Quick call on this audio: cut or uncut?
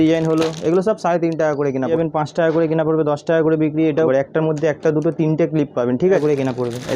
cut